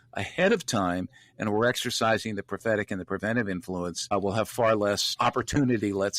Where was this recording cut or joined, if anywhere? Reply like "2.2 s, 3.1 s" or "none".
4.1 s, 5.1 s

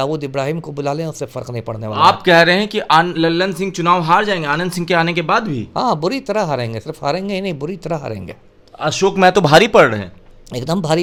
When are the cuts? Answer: none

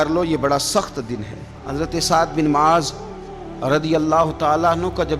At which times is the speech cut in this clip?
1.6 s

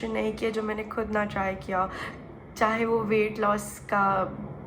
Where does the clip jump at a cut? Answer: none

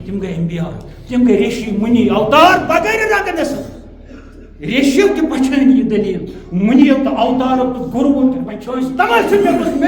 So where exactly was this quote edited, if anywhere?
8.6 s

